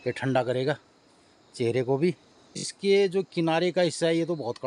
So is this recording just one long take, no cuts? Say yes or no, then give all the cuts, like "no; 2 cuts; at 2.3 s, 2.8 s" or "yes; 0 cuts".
no; 1 cut; at 2.7 s